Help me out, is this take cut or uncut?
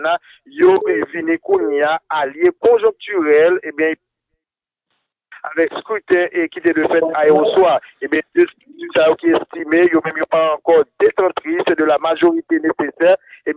uncut